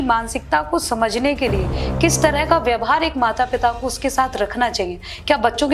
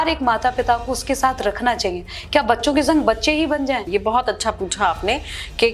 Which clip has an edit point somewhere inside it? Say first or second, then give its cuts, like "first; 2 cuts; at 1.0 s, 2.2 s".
second; 1 cut; at 3.9 s